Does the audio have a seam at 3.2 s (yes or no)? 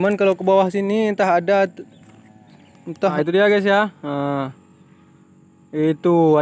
yes